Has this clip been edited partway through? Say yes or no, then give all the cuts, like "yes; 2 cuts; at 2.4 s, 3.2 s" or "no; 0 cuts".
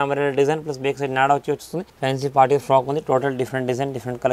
yes; 1 cut; at 1.8 s